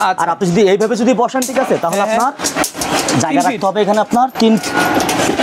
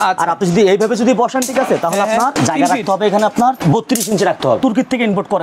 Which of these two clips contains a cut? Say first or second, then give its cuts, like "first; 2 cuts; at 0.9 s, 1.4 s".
second; 3 cuts; at 2.3 s, 3.6 s, 4.6 s